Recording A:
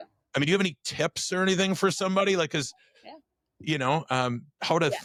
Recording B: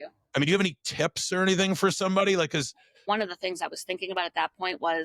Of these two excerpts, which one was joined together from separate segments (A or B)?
B